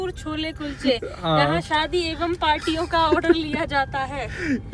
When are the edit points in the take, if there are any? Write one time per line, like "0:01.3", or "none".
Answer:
none